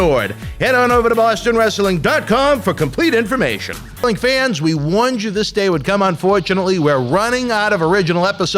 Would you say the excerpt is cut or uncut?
cut